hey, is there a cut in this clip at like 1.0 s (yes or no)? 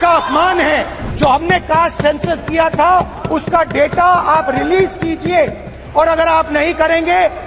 yes